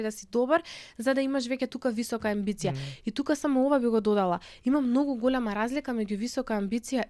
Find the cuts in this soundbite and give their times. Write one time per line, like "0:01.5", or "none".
none